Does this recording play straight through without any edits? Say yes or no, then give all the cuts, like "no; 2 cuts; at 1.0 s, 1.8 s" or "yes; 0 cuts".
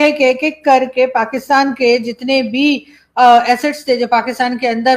yes; 0 cuts